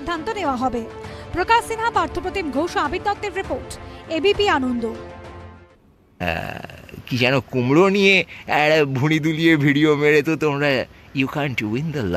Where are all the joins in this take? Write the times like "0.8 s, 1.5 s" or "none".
6.1 s